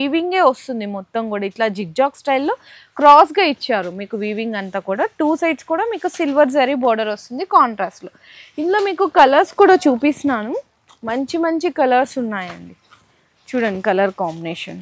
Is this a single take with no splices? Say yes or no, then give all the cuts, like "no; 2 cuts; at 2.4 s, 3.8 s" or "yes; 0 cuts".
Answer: yes; 0 cuts